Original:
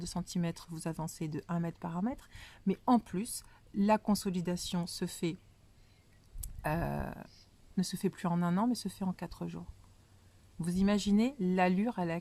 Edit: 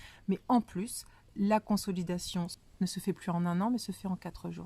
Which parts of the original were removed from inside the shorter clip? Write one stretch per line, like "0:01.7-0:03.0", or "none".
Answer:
0:04.9-0:07.5

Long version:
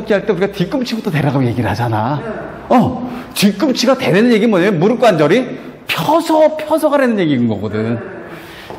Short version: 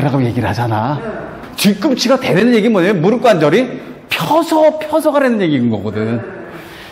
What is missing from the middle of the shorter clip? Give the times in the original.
0:02.5-0:03.1

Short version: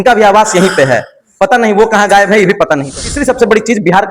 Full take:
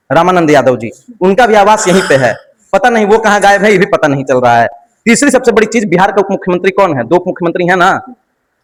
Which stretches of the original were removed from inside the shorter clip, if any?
0:04.2-0:05.0

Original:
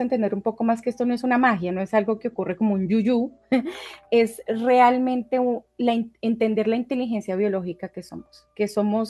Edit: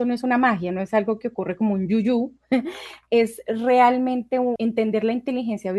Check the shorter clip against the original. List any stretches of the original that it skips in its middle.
0:05.6-0:06.2

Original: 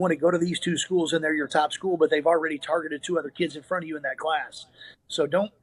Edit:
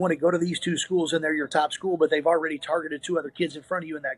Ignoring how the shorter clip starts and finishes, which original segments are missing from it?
none

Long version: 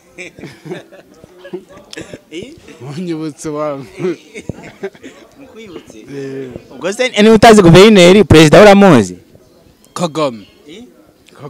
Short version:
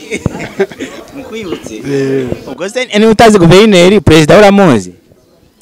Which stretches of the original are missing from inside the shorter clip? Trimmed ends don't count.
none

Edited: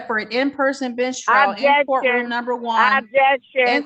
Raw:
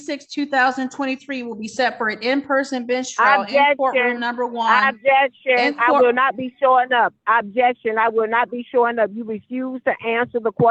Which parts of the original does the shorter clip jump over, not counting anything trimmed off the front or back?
none

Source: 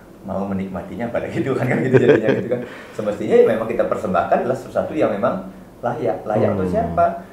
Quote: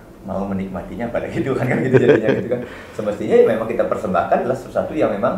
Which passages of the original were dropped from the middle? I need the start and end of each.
none

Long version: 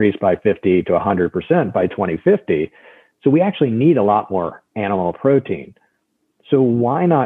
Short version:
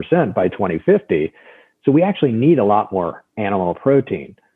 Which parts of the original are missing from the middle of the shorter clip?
none

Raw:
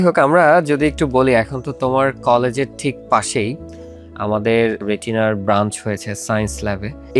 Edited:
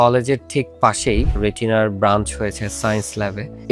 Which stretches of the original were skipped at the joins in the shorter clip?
0:03.6-0:04.8

